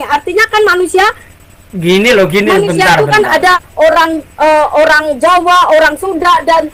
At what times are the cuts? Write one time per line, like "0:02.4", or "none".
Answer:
none